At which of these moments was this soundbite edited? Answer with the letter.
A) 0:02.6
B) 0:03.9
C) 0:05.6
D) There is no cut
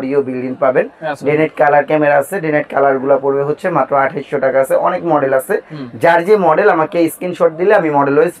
D